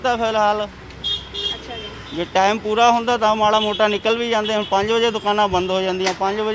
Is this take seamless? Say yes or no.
yes